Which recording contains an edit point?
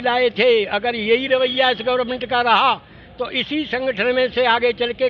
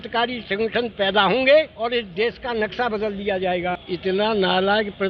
second; 2 cuts; at 1.7 s, 3.8 s

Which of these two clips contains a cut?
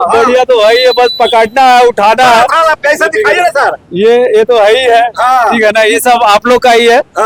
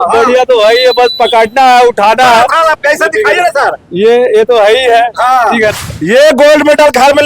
second; 1 cut; at 5.7 s

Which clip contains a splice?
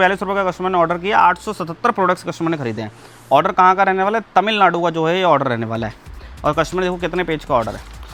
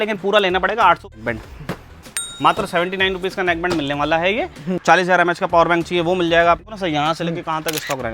second; 3 cuts; at 1.1 s, 4.8 s, 6.6 s

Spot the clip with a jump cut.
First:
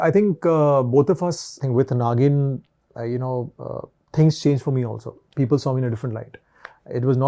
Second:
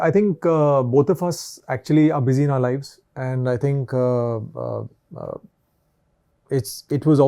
first; 1 cut; at 1.6 s

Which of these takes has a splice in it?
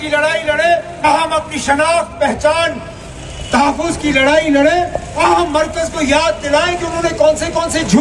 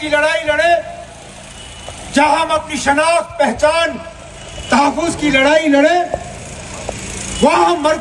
first; 2 cuts; at 1.0 s, 5.2 s

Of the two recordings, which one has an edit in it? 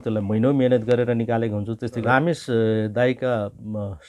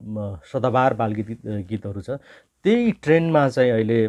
first; 1 cut; at 2.0 s

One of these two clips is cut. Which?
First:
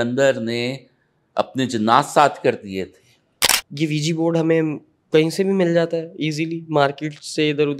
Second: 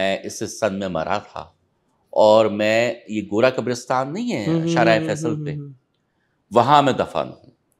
first; 1 cut; at 3.5 s

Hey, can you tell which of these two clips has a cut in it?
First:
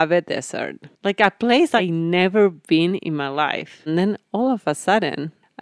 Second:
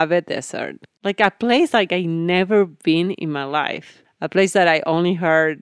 first; 2 cuts; at 1.8 s, 3.8 s

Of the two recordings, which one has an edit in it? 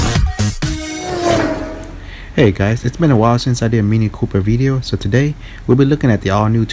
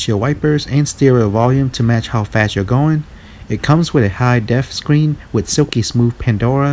second; 1 cut; at 5.5 s

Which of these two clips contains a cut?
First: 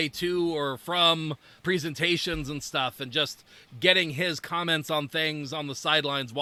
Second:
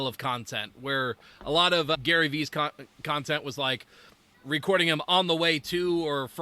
second; 1 cut; at 4.2 s

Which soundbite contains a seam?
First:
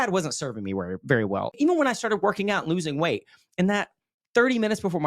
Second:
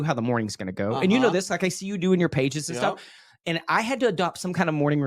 first; 1 cut; at 1.5 s

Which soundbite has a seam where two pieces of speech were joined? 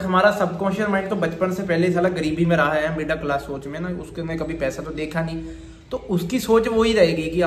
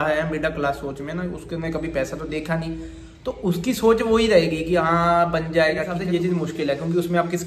second; 1 cut; at 6.0 s

